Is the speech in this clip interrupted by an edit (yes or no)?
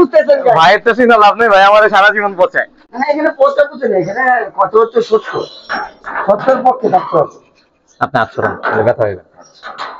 no